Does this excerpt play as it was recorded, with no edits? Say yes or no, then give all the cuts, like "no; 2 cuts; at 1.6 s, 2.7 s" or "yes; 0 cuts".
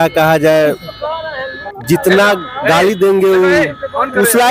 yes; 0 cuts